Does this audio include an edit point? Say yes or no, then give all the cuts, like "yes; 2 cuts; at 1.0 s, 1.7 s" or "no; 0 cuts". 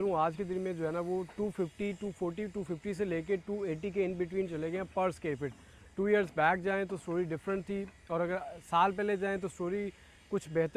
no; 0 cuts